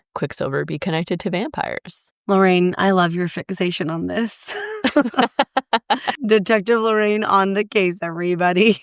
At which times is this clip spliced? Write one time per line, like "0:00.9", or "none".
0:06.1